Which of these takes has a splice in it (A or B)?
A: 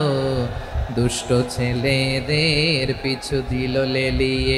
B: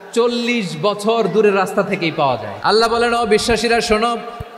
B